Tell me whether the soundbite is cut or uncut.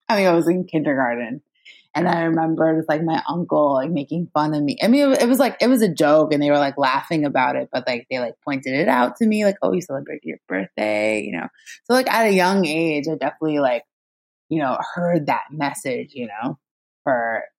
uncut